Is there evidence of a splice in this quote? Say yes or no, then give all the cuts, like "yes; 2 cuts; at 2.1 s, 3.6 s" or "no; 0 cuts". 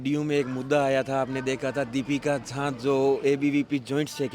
no; 0 cuts